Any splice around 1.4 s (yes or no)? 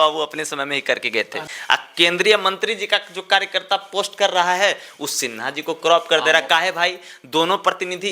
yes